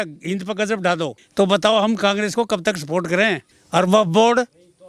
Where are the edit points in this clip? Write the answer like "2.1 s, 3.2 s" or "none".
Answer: 1.2 s, 3.5 s